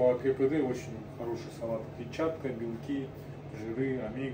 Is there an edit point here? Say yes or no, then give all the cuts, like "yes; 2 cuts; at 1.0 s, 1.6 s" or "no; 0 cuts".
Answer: no; 0 cuts